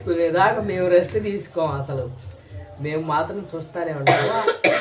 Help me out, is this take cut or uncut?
uncut